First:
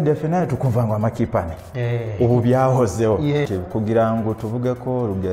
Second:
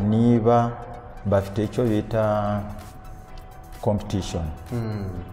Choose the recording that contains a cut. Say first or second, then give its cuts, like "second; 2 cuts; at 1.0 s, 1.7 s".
first; 1 cut; at 3.5 s